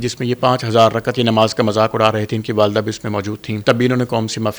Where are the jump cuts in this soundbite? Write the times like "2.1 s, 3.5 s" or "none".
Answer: 3.5 s